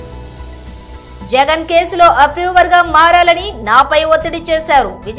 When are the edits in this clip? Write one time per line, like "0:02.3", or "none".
0:01.0